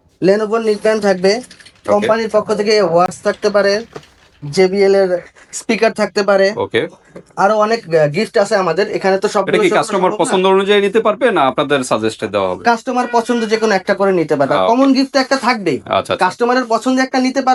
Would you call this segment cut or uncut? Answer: uncut